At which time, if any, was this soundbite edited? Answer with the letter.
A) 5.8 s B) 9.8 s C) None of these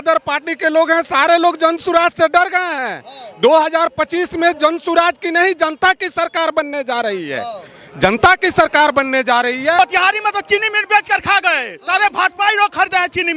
B